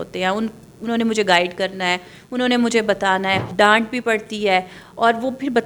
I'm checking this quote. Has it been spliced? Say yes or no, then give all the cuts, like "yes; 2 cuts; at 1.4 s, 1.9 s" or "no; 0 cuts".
yes; 1 cut; at 3.5 s